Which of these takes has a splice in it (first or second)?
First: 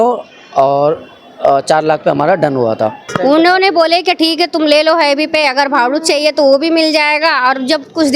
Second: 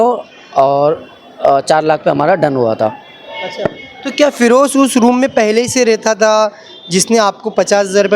first